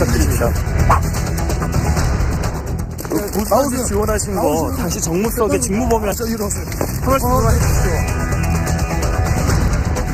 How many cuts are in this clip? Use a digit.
1